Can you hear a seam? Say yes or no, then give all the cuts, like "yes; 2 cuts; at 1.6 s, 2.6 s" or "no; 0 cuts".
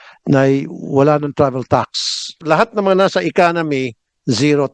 yes; 1 cut; at 2.4 s